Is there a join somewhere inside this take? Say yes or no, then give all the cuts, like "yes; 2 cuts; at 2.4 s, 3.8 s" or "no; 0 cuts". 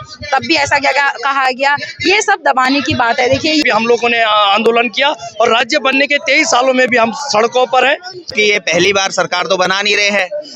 yes; 2 cuts; at 3.6 s, 8.3 s